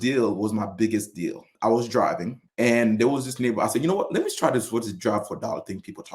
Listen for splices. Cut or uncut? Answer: cut